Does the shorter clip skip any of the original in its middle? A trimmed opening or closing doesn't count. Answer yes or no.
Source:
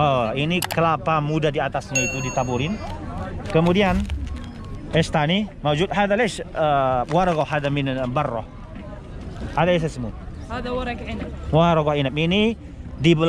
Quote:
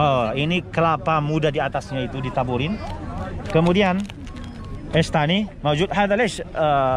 no